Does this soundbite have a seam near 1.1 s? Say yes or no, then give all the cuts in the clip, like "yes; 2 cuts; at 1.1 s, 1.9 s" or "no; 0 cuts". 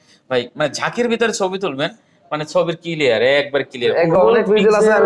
no; 1 cut; at 4.1 s